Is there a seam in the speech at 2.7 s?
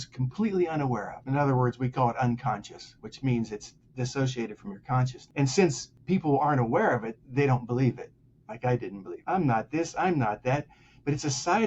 no; 4 cuts; at 1.1 s, 5.2 s, 5.9 s, 9.1 s

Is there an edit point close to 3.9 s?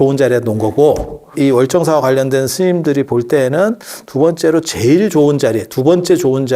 no; 1 cut; at 1.3 s

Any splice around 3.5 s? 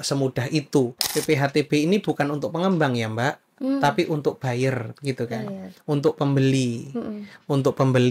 no; 1 cut; at 1.1 s

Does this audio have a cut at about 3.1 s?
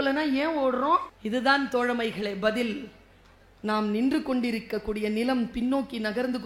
no; 1 cut; at 1.1 s

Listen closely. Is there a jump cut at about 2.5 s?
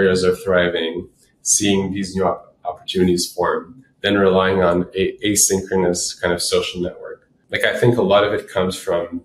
no; 1 cut; at 7.4 s

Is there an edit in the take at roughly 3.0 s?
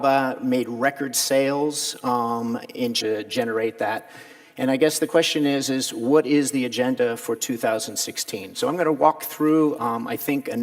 no; 0 cuts

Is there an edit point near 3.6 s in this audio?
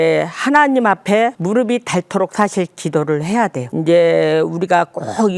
yes; 2 cuts; at 1.4 s, 3.6 s

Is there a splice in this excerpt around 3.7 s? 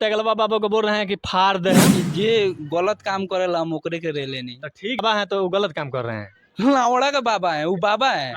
no; 2 cuts; at 1.9 s, 5.0 s

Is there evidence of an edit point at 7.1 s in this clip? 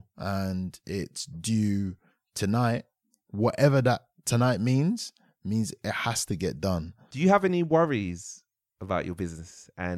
yes; 1 cut; at 7.1 s

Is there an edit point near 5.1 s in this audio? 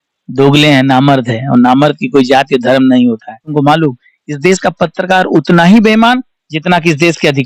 no; 1 cut; at 3.5 s

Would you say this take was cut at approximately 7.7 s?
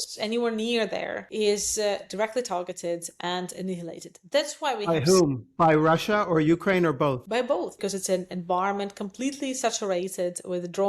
yes; 2 cuts; at 1.2 s, 7.7 s

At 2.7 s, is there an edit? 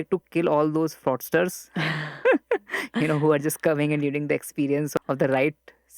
no; 1 cut; at 4.9 s

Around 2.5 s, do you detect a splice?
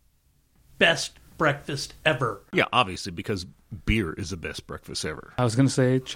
yes; 2 cuts; at 2.5 s, 5.2 s

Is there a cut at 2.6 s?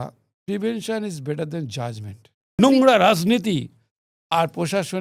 yes; 1 cut; at 2.6 s

